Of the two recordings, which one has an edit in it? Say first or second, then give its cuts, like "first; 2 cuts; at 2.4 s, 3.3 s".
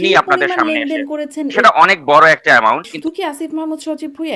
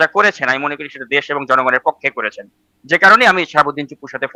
first; 2 cuts; at 1.5 s, 2.9 s